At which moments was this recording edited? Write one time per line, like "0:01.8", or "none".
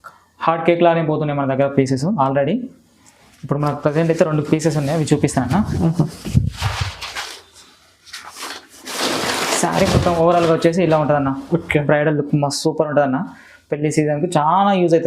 0:07.0